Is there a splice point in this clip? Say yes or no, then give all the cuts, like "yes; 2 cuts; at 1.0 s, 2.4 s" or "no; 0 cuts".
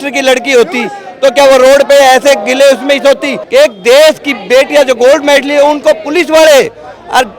yes; 1 cut; at 3.3 s